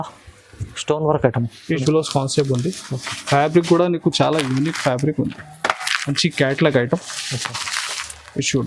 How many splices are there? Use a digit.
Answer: 1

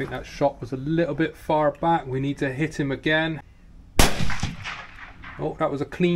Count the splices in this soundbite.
1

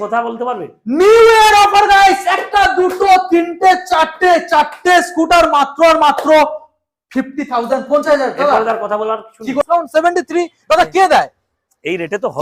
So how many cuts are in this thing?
1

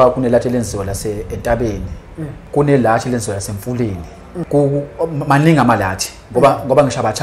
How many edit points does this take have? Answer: 2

